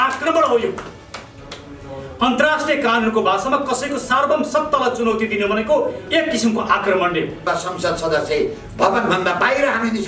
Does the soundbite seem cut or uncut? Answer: cut